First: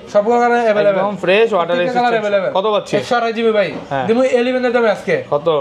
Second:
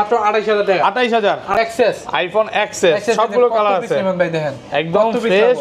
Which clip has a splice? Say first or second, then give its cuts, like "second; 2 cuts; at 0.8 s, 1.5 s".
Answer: second; 1 cut; at 1.5 s